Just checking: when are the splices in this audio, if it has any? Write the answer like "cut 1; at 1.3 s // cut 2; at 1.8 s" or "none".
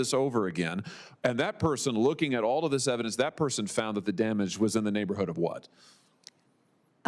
none